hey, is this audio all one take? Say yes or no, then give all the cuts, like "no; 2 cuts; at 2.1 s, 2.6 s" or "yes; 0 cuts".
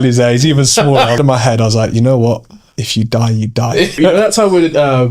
no; 2 cuts; at 1.2 s, 4.0 s